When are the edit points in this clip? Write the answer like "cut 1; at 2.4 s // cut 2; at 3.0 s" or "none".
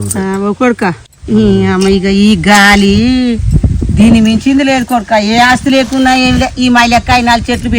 cut 1; at 1.1 s